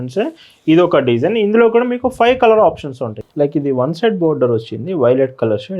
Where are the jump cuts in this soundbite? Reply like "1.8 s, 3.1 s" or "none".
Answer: 3.3 s

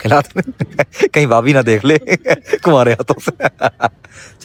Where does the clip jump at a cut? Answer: none

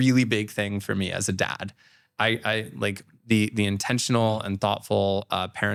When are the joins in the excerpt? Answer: none

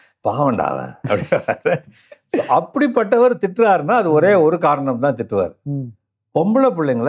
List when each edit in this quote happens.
none

